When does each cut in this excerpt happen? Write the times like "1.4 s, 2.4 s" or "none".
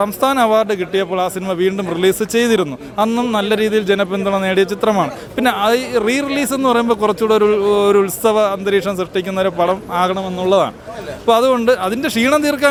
none